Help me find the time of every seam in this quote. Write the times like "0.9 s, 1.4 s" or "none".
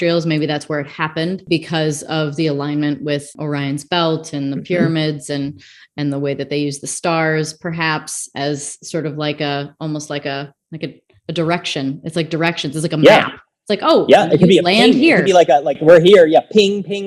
1.4 s, 3.4 s